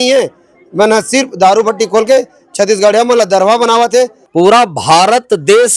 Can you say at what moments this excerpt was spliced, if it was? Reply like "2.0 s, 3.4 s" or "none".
4.2 s